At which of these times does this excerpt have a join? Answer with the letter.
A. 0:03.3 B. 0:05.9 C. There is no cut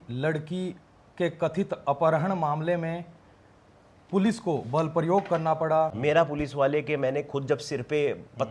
B